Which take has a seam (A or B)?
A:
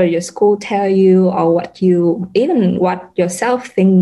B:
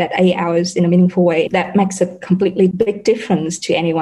B